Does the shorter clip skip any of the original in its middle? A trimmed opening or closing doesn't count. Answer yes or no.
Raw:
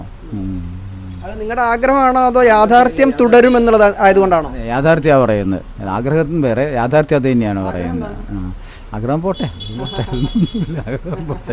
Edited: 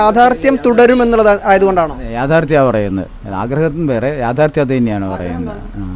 no